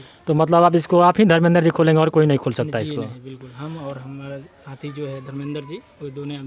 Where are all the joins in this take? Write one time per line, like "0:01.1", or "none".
none